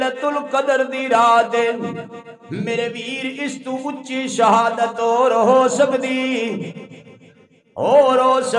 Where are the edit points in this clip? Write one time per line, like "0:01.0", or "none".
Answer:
none